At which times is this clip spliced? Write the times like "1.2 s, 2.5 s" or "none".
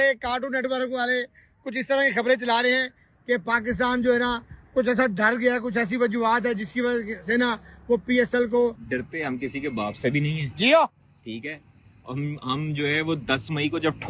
8.8 s